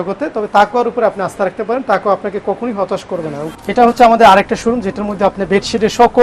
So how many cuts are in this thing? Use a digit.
1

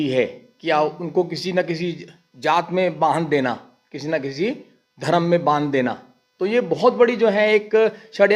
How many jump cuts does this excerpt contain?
0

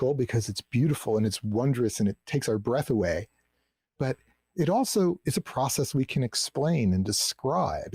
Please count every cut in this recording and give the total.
0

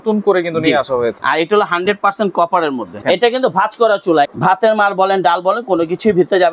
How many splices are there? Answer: 3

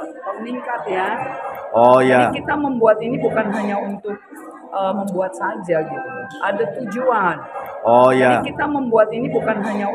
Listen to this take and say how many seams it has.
1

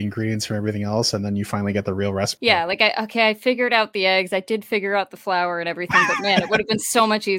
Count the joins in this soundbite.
1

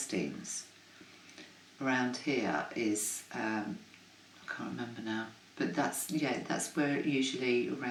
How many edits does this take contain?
0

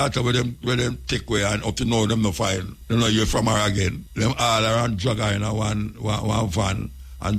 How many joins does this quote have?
2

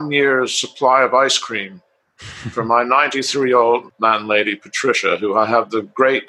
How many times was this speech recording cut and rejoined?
1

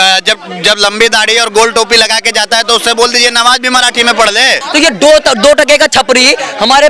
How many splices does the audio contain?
1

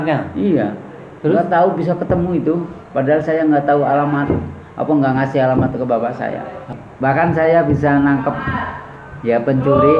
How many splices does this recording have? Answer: 1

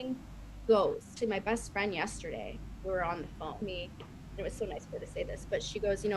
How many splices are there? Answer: 2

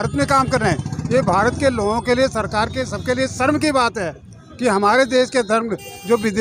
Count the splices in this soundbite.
0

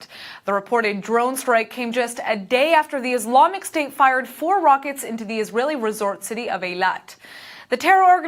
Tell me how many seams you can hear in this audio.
0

